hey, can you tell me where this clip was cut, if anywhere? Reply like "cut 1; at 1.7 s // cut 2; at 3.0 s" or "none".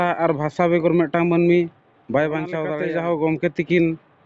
cut 1; at 2.6 s